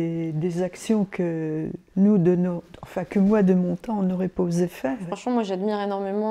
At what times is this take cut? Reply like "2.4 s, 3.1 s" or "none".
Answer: 5.1 s